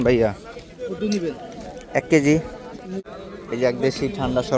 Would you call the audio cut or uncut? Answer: cut